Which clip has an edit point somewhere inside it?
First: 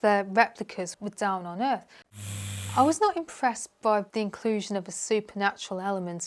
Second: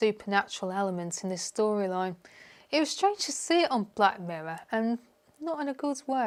first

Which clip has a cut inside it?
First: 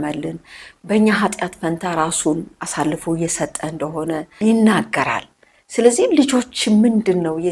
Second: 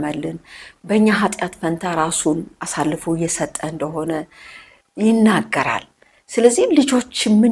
first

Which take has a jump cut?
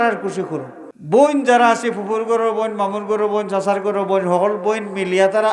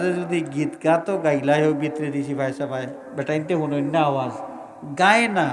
first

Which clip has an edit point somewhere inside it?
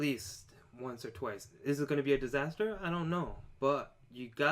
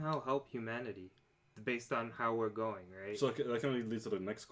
first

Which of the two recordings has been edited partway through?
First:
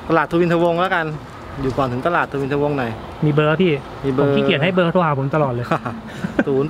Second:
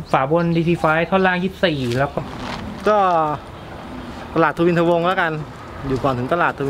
second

